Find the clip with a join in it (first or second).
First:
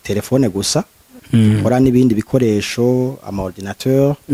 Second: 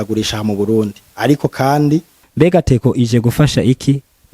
second